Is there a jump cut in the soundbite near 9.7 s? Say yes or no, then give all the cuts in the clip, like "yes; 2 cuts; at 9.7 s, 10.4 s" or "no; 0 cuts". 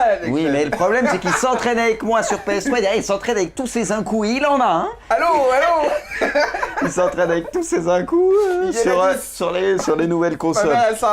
yes; 1 cut; at 9.7 s